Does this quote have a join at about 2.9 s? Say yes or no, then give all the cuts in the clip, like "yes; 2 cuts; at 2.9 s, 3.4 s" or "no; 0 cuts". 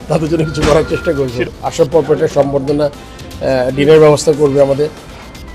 no; 1 cut; at 1.5 s